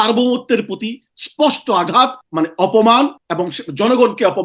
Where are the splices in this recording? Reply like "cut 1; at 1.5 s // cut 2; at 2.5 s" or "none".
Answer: cut 1; at 2.2 s // cut 2; at 3.3 s